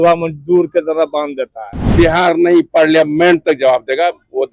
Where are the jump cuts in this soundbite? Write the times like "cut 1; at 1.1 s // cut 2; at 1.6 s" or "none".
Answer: cut 1; at 1.8 s